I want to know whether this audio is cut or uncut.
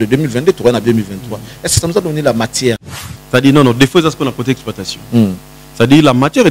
cut